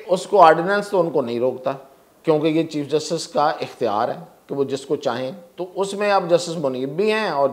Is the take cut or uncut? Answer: uncut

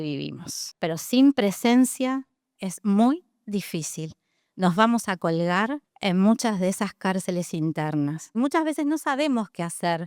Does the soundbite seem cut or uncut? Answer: cut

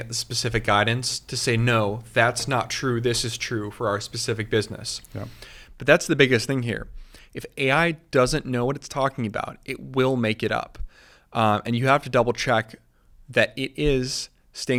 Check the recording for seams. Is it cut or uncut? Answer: uncut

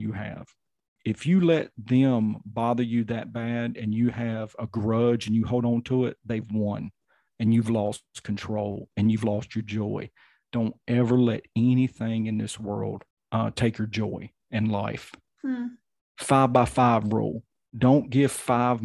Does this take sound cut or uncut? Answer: cut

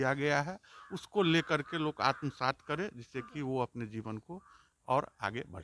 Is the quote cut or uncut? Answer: uncut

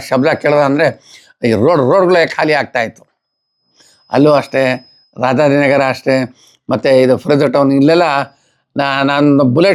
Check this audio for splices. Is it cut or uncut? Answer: uncut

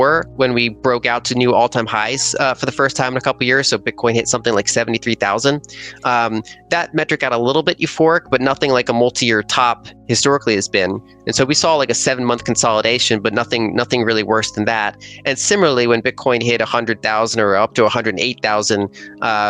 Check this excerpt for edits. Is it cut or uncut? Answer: uncut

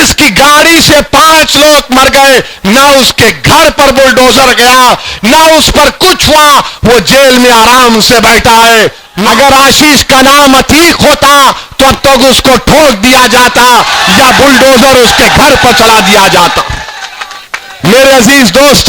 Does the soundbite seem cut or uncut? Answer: cut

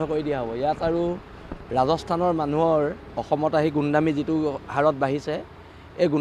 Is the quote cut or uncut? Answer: uncut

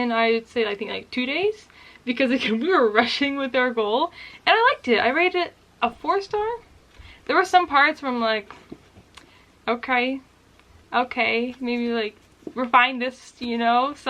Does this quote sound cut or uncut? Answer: uncut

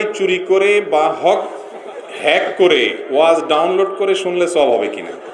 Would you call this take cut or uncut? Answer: uncut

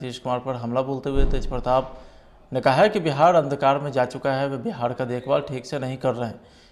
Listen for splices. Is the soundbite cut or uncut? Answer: uncut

